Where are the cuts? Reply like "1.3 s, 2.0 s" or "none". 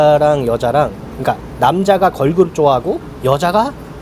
1.1 s, 3.1 s